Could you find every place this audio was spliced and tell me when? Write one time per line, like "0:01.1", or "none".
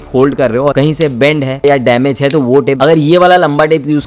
0:00.7
0:02.8